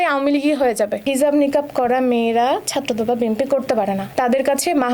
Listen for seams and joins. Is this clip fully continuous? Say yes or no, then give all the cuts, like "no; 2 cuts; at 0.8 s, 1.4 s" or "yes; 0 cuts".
no; 2 cuts; at 1.0 s, 4.1 s